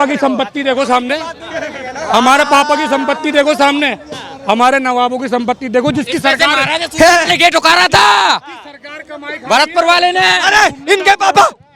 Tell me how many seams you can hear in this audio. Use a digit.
0